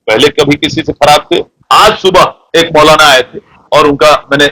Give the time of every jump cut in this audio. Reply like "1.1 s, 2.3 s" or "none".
1.5 s